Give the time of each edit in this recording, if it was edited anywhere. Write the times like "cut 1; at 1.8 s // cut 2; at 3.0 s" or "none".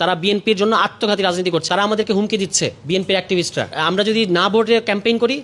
cut 1; at 1.7 s // cut 2; at 3.7 s